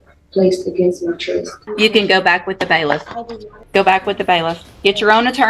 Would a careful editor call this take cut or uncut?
cut